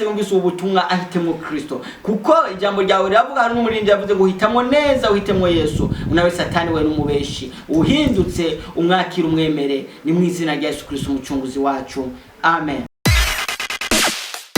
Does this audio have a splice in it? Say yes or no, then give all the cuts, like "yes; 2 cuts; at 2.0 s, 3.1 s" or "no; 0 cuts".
yes; 1 cut; at 12.9 s